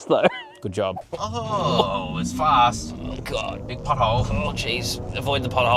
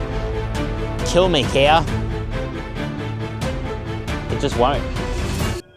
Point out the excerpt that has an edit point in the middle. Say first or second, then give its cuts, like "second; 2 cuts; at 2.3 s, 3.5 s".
first; 1 cut; at 1.1 s